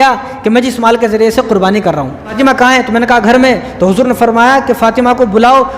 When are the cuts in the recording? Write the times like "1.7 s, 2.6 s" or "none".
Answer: 2.3 s